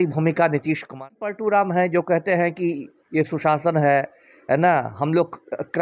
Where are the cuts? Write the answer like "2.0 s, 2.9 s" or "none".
1.2 s